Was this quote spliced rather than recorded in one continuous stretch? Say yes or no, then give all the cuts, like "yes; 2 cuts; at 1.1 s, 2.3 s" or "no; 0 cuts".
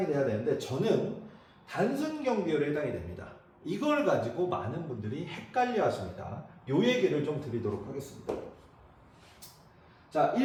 no; 0 cuts